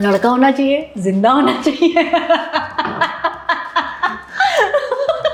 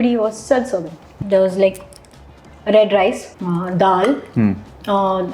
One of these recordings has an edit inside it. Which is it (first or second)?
second